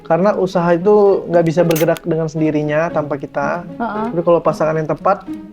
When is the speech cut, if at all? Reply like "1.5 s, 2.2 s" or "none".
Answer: none